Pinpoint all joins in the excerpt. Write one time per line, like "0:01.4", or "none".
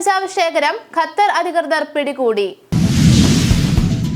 0:02.6